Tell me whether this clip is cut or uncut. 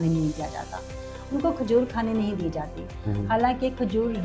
uncut